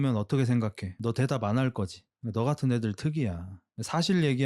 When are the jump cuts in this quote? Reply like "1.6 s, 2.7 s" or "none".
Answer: none